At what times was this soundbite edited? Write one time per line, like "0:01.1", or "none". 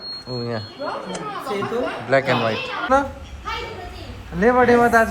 0:02.9